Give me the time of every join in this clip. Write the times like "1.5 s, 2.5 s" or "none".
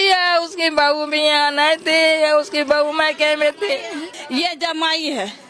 4.1 s